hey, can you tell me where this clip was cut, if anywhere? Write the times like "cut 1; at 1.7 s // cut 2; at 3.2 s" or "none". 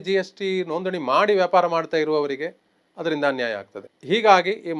none